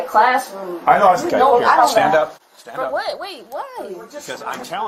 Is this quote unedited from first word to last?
no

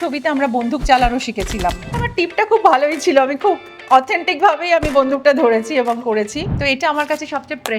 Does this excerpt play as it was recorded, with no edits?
no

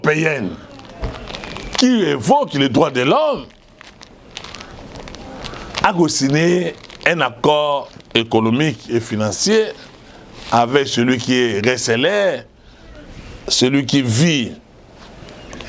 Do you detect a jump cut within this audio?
no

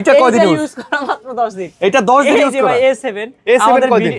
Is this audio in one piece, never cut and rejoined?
yes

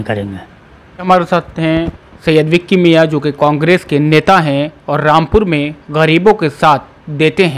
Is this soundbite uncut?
no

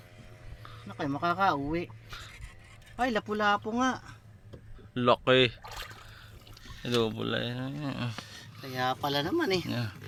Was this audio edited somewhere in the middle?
no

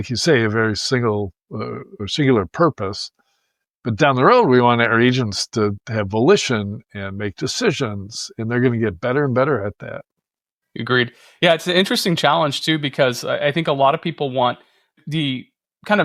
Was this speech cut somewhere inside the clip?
no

